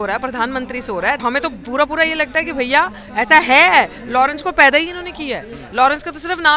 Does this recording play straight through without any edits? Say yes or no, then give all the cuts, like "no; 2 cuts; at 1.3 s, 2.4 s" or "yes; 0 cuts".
no; 1 cut; at 1.2 s